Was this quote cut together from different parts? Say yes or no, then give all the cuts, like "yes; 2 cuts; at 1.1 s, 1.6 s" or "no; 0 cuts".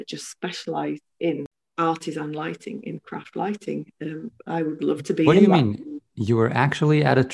yes; 1 cut; at 1.6 s